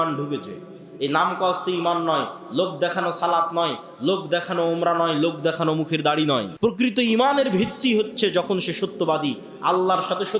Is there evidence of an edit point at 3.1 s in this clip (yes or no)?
no